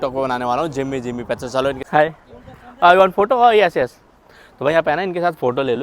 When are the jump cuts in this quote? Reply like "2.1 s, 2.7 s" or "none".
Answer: 1.8 s